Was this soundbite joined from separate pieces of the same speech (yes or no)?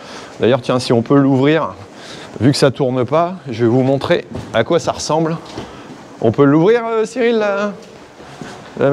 no